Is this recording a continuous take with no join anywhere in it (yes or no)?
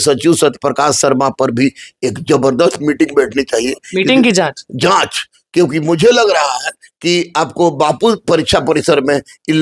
yes